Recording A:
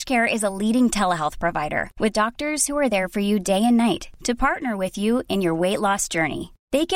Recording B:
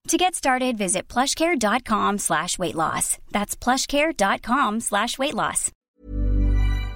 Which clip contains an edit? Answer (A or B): B